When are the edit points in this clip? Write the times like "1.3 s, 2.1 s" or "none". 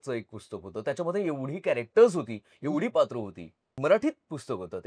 3.7 s